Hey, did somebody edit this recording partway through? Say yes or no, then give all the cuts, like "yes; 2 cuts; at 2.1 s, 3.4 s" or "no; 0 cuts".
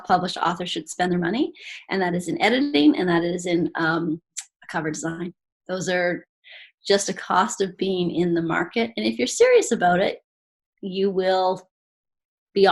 no; 0 cuts